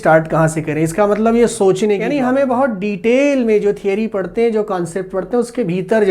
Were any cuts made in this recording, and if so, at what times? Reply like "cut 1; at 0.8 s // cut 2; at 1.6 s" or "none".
cut 1; at 2.0 s